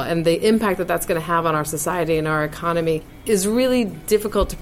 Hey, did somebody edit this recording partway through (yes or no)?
yes